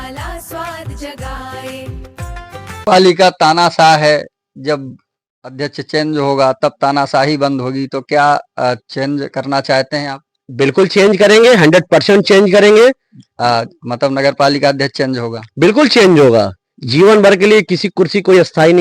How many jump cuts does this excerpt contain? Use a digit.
1